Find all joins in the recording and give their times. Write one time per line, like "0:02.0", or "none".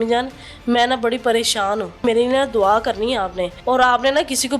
0:02.0
0:03.5